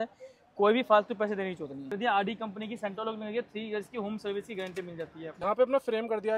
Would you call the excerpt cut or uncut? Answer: cut